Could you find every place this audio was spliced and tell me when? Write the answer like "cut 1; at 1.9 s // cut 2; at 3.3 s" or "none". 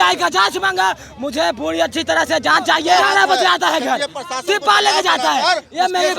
cut 1; at 3.0 s